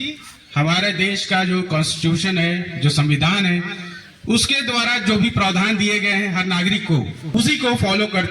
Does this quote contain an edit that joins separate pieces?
yes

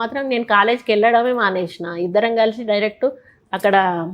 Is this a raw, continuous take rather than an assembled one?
yes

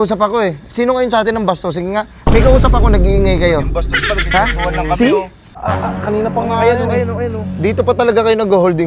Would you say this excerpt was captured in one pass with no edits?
no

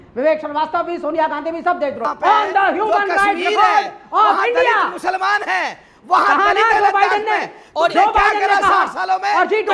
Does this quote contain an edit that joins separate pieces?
yes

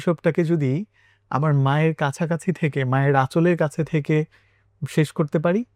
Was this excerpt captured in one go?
yes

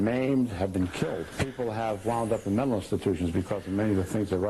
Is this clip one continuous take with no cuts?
yes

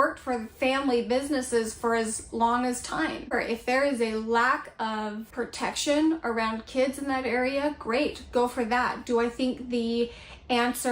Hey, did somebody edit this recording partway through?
yes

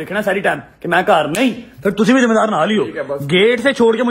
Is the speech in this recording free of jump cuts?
yes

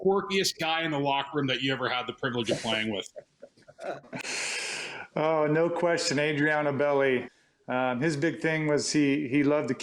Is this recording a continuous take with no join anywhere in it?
no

